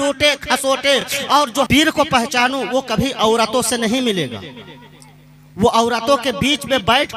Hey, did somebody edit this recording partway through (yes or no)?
yes